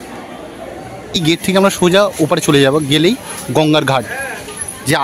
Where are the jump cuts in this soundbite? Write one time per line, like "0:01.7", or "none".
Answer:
0:01.2